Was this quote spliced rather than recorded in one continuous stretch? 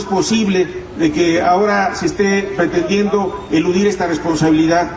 no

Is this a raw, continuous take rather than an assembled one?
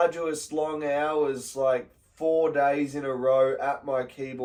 yes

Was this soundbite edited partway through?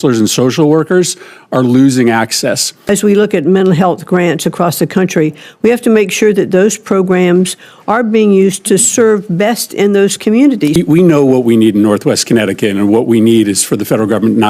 yes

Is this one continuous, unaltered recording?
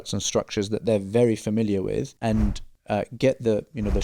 yes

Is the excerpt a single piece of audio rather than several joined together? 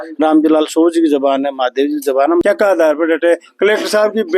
no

